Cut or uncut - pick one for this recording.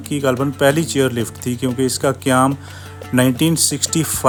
uncut